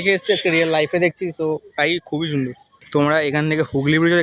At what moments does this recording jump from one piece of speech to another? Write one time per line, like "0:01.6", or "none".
0:02.7